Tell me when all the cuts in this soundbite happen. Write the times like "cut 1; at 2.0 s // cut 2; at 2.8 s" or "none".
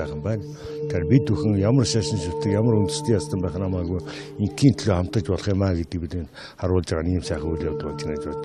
none